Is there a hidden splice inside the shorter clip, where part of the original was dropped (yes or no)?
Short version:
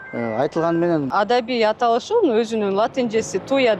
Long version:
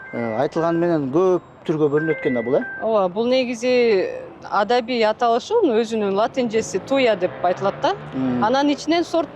yes